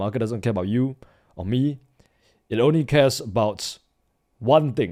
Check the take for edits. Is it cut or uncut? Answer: uncut